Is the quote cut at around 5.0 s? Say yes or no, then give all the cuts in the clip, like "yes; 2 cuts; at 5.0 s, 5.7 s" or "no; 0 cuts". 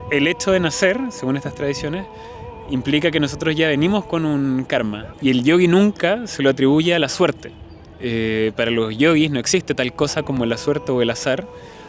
yes; 1 cut; at 5.0 s